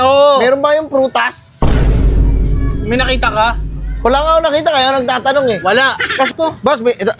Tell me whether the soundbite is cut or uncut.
cut